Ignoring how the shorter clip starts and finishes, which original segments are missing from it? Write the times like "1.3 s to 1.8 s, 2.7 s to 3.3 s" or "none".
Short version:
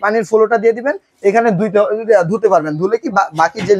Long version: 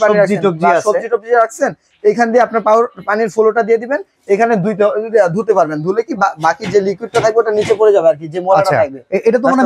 none